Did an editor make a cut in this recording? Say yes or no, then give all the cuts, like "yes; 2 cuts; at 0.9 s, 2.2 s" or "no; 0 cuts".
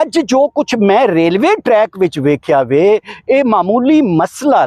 no; 0 cuts